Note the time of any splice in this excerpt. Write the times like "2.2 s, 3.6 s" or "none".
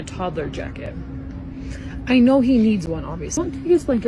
none